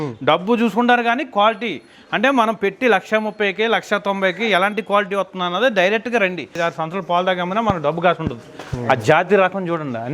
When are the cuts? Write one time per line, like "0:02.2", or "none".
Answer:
0:06.6